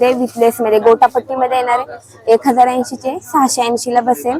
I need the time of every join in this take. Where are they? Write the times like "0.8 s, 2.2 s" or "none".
none